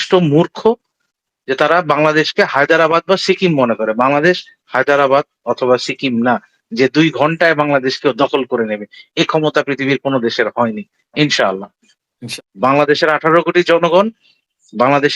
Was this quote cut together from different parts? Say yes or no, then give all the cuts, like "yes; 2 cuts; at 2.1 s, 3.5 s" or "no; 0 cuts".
yes; 1 cut; at 12.1 s